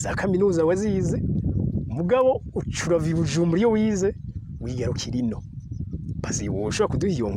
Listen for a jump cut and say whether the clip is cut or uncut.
uncut